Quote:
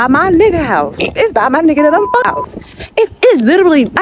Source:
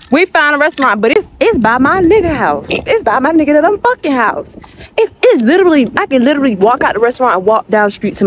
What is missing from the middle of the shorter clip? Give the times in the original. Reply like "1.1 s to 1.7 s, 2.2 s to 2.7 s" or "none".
4.0 s to 4.3 s